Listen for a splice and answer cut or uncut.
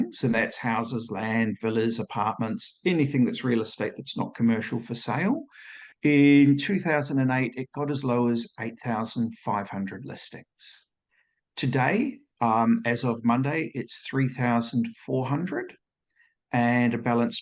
uncut